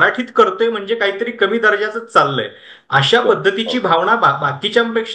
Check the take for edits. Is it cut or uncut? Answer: uncut